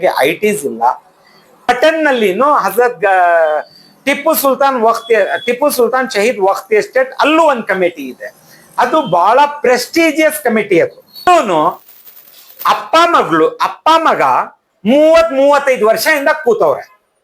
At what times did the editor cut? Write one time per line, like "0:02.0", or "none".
0:01.7
0:11.3